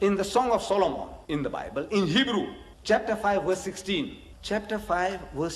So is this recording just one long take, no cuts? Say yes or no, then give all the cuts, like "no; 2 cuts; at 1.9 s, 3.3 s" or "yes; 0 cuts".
no; 3 cuts; at 1.1 s, 2.7 s, 4.3 s